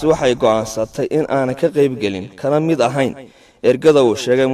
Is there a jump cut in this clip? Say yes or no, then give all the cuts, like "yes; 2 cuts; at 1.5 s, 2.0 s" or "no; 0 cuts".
no; 0 cuts